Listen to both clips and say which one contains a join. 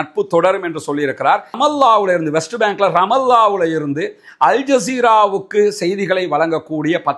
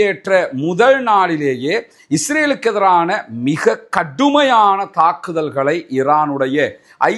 first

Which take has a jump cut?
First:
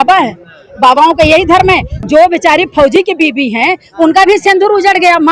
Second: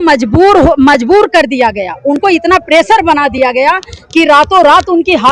first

